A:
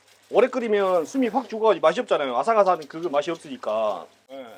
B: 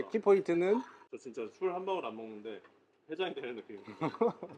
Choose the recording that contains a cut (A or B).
B